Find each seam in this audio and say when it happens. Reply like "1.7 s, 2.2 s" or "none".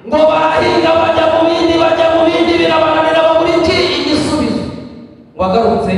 none